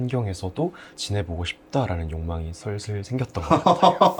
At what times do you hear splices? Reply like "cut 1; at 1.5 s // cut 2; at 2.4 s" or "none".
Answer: none

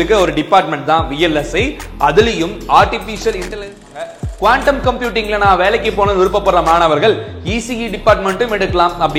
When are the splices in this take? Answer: cut 1; at 4.1 s

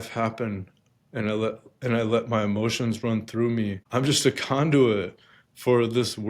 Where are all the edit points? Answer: cut 1; at 3.8 s

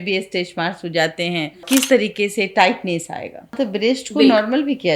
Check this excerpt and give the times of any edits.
cut 1; at 1.6 s // cut 2; at 3.5 s

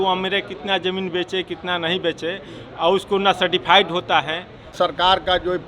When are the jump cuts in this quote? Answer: cut 1; at 4.7 s

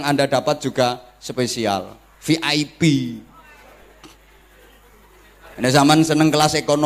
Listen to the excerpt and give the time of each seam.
none

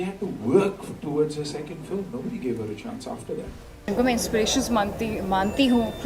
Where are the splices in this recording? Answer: cut 1; at 3.9 s

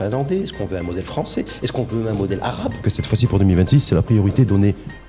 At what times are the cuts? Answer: cut 1; at 2.9 s

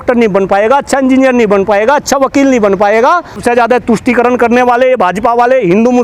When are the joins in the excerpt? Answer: cut 1; at 3.4 s

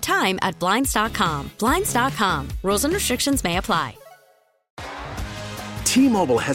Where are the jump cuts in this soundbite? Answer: cut 1; at 4.6 s

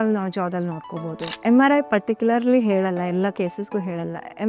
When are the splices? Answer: cut 1; at 1.3 s

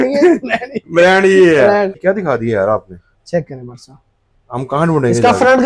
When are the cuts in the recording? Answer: cut 1; at 2.0 s

